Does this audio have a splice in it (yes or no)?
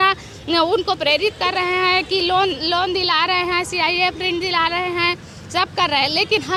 no